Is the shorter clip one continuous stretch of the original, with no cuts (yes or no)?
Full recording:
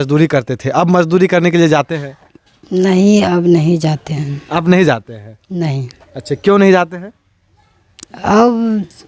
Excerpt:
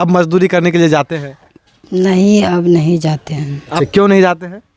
no